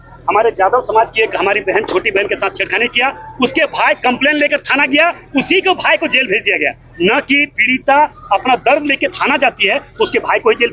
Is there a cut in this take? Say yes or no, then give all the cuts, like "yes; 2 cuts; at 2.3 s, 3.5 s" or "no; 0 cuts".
no; 0 cuts